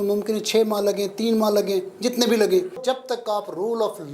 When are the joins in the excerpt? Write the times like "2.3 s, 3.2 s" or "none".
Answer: 2.8 s